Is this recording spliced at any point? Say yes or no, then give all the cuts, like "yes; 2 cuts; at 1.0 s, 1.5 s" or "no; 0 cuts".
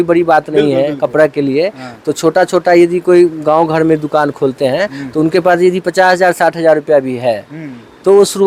no; 0 cuts